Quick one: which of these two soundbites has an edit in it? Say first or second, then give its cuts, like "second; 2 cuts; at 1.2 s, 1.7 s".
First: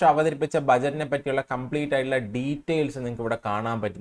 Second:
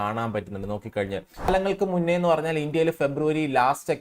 second; 1 cut; at 1.5 s